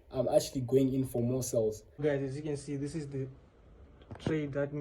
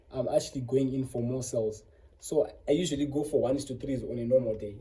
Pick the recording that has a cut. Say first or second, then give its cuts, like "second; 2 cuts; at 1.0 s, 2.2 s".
first; 1 cut; at 2.0 s